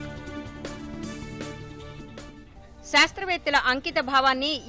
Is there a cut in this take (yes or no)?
yes